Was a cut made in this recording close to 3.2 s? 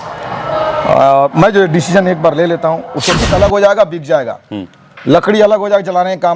yes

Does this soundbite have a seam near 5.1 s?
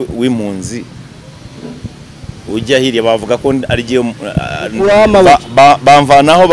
yes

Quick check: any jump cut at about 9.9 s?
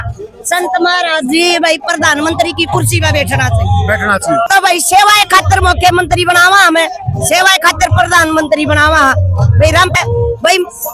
yes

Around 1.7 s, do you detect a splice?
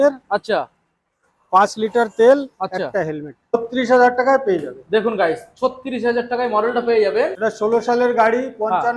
no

